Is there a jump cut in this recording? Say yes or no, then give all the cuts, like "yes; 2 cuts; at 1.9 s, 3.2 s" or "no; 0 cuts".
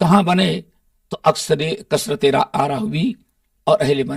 no; 0 cuts